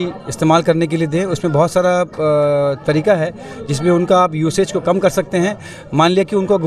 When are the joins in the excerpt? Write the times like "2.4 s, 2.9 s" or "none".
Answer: none